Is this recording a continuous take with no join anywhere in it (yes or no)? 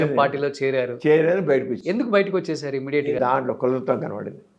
no